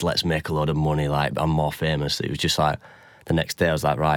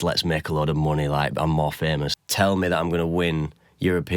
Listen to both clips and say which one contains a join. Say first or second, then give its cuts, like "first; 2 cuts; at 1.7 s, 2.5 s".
second; 1 cut; at 2.2 s